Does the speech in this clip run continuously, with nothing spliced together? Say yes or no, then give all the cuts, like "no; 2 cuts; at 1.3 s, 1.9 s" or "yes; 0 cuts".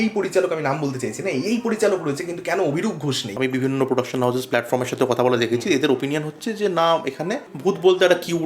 no; 2 cuts; at 3.3 s, 7.5 s